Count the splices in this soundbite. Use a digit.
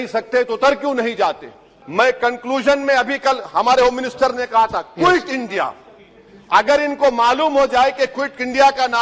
1